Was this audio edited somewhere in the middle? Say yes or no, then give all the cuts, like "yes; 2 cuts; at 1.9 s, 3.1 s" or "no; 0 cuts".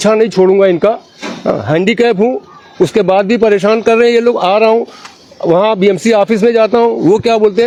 no; 0 cuts